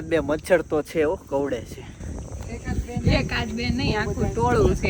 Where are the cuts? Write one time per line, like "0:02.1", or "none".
none